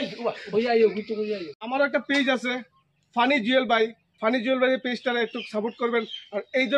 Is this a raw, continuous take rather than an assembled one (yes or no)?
no